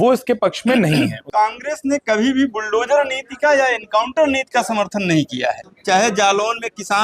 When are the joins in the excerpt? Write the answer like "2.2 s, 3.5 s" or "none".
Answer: 1.2 s, 5.7 s